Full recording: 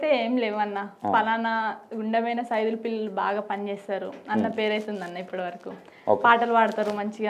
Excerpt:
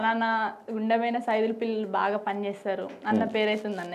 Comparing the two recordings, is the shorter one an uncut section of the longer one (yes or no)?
yes